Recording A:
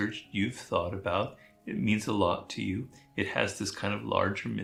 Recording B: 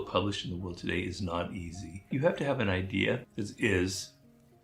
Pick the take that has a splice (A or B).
B